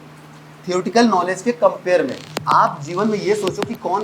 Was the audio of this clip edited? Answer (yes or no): yes